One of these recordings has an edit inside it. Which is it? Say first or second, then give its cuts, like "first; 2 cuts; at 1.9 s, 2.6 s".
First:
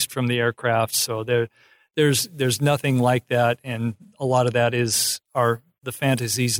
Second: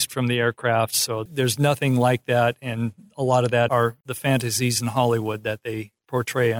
second; 2 cuts; at 1.2 s, 3.7 s